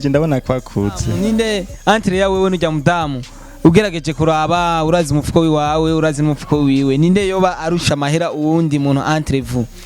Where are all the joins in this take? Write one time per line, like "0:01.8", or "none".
0:01.1